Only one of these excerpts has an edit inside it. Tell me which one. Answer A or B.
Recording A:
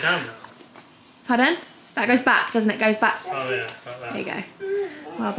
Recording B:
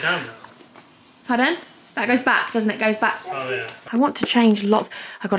B